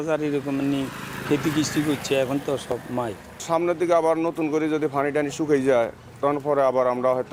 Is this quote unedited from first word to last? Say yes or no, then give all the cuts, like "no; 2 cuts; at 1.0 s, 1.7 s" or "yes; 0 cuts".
yes; 0 cuts